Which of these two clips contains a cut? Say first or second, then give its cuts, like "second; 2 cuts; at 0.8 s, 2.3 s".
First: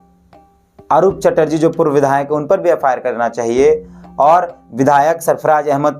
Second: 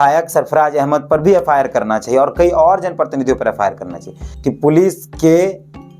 second; 1 cut; at 4.2 s